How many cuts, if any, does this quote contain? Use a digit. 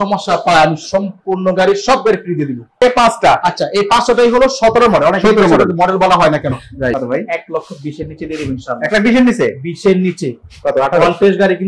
2